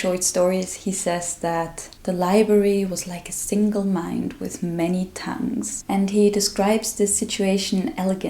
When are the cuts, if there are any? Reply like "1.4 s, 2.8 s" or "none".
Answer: 5.7 s